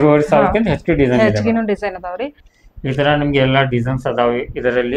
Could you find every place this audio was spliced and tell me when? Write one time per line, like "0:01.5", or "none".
0:02.3